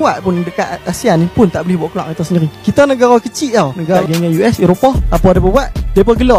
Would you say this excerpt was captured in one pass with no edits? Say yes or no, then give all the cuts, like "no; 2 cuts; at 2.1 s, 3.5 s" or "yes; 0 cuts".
no; 1 cut; at 4.0 s